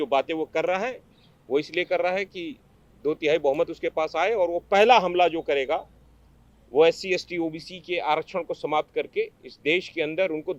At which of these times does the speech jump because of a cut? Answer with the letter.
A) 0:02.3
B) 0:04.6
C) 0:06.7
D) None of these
D